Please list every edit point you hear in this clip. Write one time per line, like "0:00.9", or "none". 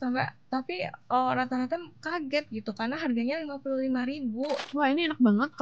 0:04.6